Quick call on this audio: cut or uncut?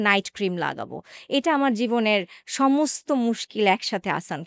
uncut